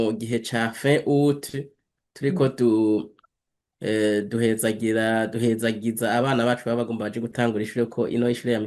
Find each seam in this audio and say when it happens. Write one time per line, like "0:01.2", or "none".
none